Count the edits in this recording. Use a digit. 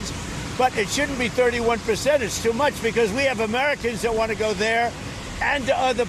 0